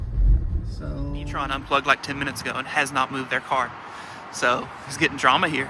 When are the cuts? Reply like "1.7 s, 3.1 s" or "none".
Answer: 1.5 s